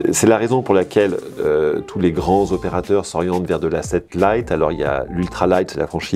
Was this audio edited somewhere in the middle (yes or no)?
no